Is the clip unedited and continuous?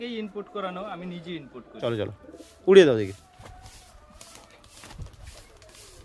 no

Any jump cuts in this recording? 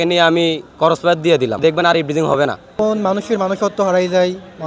yes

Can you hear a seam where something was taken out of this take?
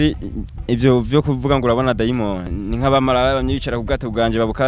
yes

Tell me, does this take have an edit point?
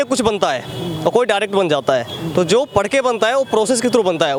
no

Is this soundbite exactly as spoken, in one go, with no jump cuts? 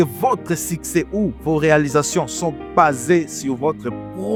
yes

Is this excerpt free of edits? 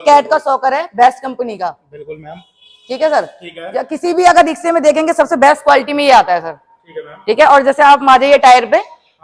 yes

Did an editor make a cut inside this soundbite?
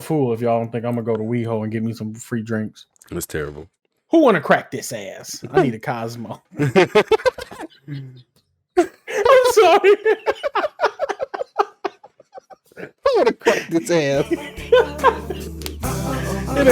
no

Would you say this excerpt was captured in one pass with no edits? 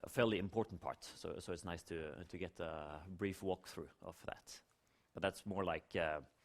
no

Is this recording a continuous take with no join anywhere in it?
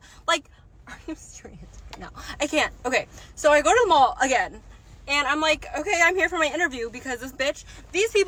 yes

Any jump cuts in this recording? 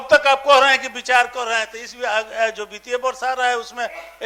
no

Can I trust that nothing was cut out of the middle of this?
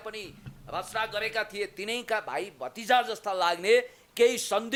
yes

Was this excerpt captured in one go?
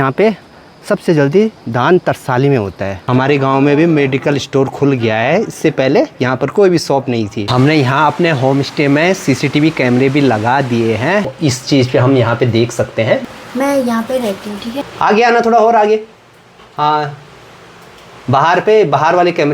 no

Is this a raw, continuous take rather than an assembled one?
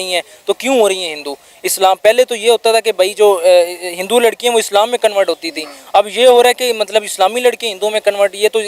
yes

